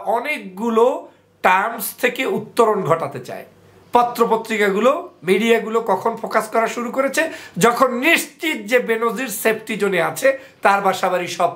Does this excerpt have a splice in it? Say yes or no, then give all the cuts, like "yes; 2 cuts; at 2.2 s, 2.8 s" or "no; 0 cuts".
yes; 1 cut; at 3.7 s